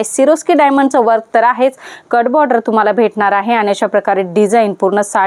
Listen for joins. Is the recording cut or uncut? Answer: uncut